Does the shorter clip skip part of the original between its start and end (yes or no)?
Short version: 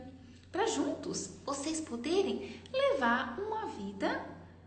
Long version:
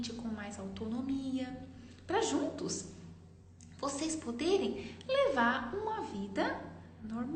yes